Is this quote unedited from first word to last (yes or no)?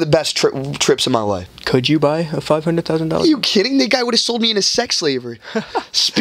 no